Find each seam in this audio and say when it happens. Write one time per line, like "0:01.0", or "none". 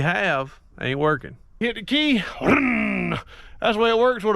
0:01.5